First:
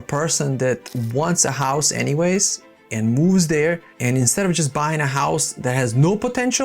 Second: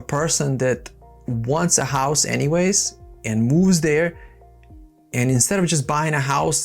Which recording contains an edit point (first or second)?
first